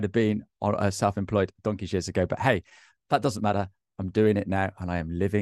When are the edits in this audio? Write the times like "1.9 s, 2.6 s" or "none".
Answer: none